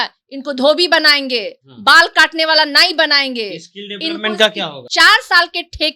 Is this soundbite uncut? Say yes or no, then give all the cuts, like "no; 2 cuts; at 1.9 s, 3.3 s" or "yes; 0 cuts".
no; 1 cut; at 4.8 s